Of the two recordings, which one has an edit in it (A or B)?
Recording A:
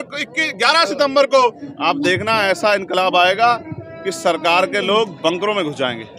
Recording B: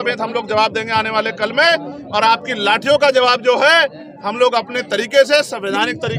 A